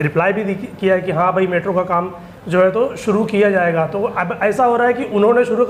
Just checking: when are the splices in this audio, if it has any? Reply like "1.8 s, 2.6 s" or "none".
none

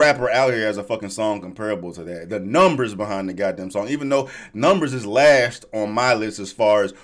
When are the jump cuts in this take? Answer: none

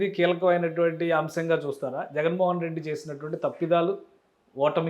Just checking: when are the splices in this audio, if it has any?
none

